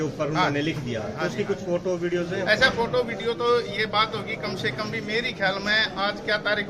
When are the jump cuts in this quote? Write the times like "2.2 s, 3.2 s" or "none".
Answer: none